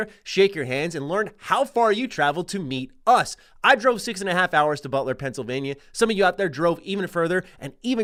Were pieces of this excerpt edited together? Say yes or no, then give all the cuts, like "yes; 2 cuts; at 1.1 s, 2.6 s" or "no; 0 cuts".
no; 0 cuts